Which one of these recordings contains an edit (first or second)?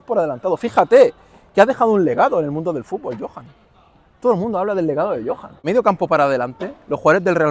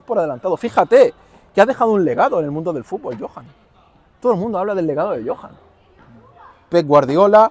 first